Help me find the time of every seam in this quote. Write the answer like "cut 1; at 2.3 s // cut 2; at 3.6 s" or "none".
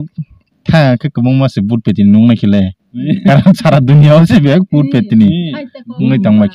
none